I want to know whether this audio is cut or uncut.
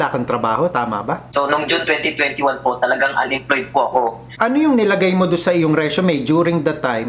cut